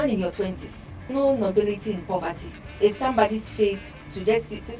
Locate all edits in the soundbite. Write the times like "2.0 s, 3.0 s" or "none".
1.0 s, 2.6 s